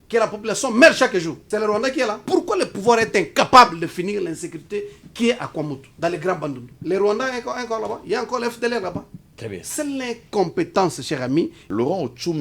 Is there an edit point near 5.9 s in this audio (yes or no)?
yes